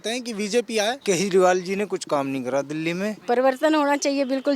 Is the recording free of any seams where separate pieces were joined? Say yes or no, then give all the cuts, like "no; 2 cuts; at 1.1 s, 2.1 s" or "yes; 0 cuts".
no; 2 cuts; at 1.0 s, 3.2 s